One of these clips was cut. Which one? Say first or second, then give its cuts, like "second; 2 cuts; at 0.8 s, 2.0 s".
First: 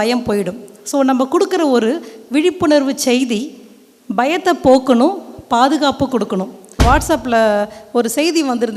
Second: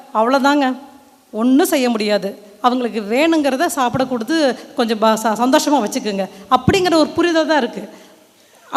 first; 1 cut; at 6.8 s